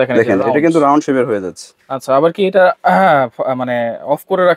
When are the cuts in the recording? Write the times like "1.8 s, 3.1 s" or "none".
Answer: none